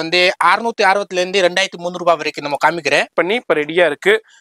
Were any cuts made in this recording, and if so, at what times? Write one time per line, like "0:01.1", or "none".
0:03.1